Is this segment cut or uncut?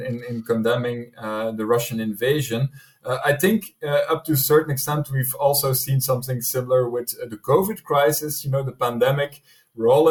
uncut